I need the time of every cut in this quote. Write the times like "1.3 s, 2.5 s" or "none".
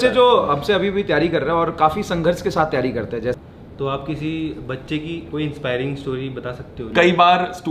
3.4 s, 6.8 s

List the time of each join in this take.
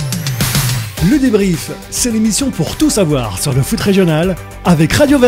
none

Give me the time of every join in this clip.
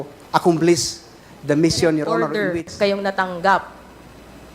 2.3 s

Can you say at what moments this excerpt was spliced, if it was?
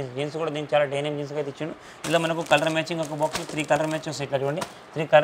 none

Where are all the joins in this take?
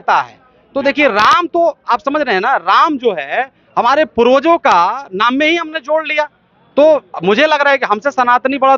none

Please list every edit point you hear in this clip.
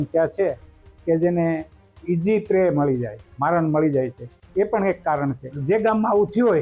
5.5 s

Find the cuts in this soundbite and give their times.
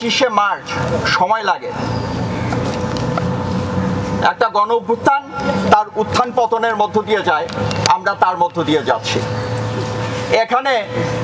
none

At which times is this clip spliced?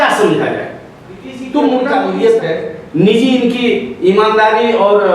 1.9 s

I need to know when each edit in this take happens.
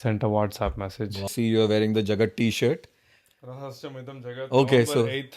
1.3 s

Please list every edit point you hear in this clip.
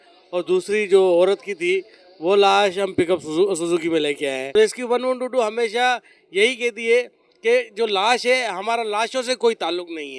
4.5 s

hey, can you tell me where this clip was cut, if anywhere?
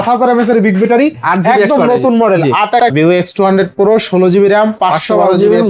2.9 s

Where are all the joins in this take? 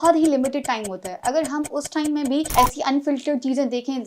2.5 s

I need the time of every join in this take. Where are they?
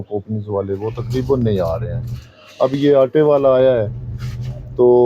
none

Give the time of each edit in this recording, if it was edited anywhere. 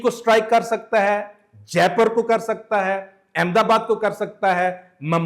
none

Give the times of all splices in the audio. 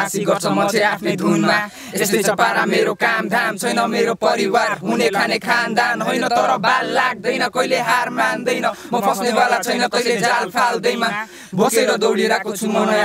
none

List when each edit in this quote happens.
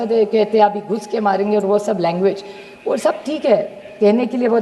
none

